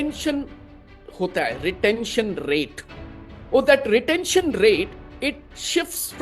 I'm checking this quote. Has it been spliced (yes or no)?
yes